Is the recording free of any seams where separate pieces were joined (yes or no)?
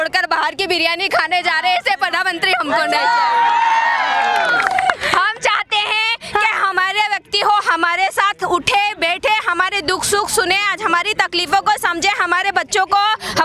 yes